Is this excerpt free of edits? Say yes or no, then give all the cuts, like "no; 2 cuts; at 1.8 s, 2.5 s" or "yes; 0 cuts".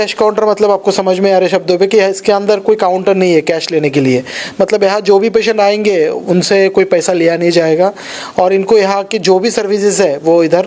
yes; 0 cuts